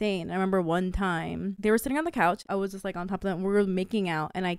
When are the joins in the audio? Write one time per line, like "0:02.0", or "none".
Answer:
0:01.5
0:02.4